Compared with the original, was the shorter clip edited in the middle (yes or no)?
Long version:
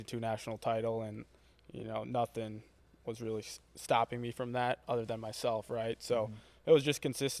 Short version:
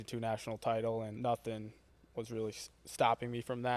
yes